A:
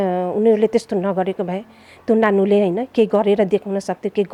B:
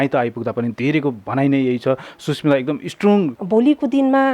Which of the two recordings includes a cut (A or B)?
B